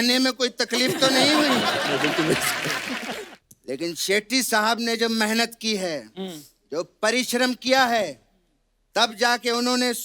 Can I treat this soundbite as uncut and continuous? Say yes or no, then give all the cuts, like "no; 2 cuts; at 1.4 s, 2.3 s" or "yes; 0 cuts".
no; 1 cut; at 3.1 s